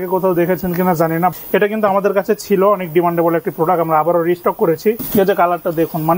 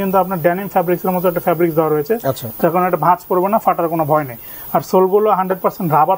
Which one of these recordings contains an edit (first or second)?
first